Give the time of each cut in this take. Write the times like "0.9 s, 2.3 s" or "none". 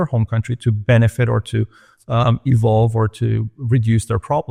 none